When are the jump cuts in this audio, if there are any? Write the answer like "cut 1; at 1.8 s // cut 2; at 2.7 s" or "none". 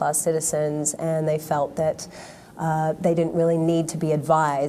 cut 1; at 3.4 s